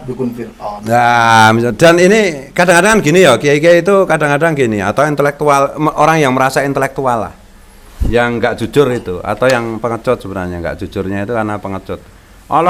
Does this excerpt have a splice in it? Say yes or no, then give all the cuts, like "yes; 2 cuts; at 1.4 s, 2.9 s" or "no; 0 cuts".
no; 0 cuts